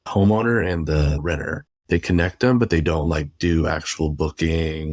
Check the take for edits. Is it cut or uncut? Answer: cut